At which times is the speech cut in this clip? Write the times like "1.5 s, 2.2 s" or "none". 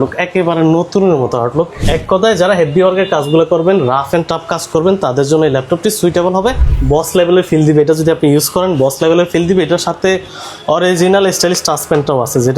1.9 s, 6.7 s